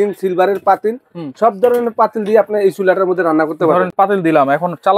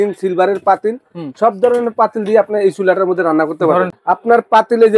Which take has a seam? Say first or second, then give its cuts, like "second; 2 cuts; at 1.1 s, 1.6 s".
second; 1 cut; at 3.9 s